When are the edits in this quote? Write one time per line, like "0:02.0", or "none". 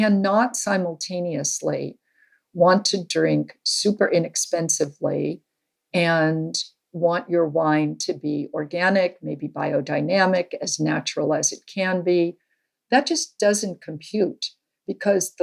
none